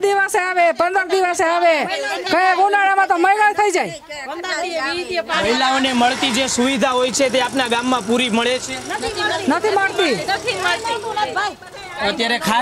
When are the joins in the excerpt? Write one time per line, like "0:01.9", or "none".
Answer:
none